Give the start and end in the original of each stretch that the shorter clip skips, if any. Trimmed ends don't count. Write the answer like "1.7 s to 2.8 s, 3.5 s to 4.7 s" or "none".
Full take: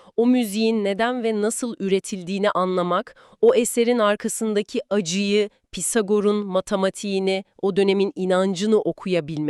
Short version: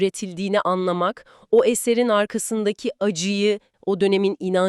5.6 s to 7.5 s